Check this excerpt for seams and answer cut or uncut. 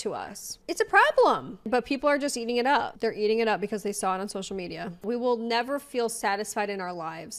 cut